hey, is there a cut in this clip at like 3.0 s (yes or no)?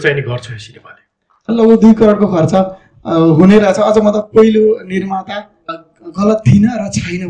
no